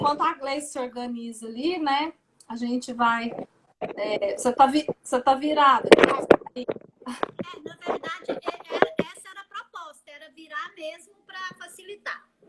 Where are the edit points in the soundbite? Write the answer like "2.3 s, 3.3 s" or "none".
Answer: none